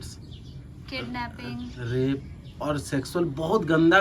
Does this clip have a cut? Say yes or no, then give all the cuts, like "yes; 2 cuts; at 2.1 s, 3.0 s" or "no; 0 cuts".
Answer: no; 0 cuts